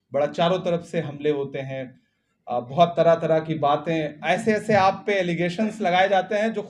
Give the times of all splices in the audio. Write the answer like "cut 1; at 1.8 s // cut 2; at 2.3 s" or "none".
none